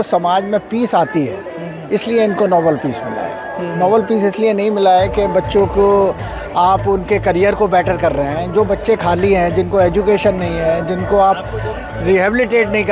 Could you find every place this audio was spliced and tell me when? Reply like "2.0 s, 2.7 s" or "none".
none